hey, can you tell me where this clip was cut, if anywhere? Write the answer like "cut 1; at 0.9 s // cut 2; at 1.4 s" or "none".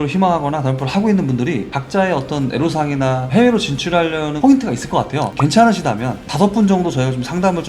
none

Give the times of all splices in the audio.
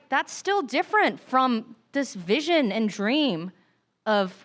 none

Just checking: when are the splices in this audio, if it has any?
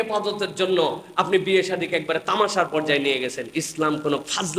none

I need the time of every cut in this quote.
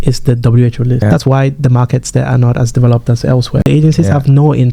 cut 1; at 1.0 s // cut 2; at 3.6 s

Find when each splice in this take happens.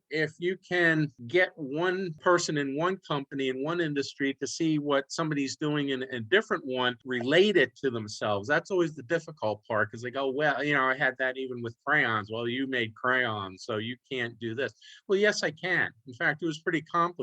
cut 1; at 1.2 s // cut 2; at 2.2 s // cut 3; at 7.0 s

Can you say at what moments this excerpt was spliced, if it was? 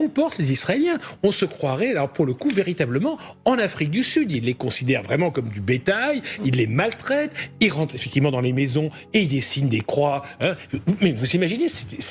none

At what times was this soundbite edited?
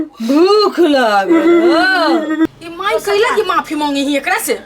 cut 1; at 2.6 s

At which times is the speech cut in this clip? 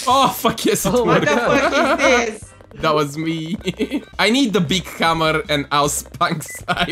cut 1; at 4.1 s

